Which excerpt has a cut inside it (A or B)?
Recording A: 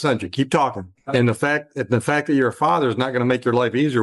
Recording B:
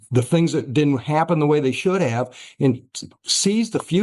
A